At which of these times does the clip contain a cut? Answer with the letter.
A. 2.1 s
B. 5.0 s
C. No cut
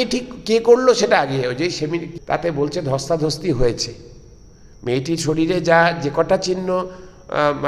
A